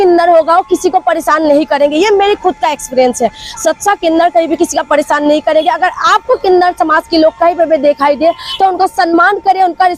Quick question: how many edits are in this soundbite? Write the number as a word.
zero